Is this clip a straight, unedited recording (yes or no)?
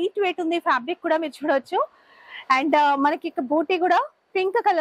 yes